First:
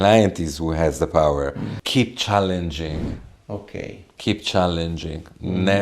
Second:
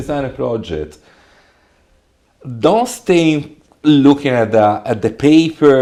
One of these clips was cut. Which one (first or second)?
first